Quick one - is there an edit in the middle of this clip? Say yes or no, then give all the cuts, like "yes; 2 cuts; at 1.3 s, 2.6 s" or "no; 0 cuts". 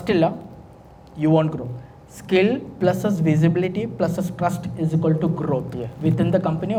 no; 0 cuts